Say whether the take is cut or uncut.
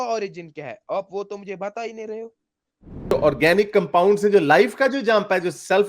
cut